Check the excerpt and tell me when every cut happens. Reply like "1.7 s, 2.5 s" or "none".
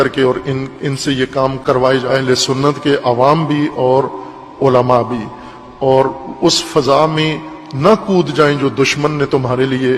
none

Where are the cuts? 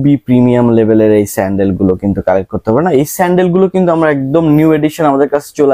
none

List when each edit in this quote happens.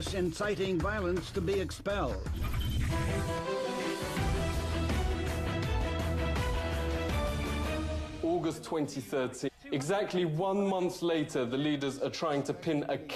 none

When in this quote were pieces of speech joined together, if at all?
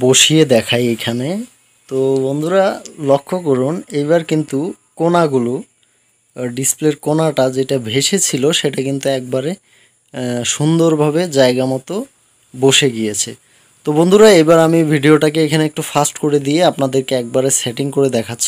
none

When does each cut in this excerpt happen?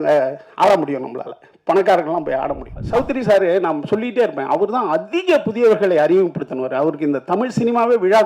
2.7 s

